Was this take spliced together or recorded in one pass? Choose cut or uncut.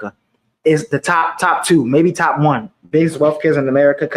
uncut